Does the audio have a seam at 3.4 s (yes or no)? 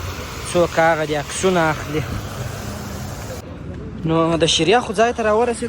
yes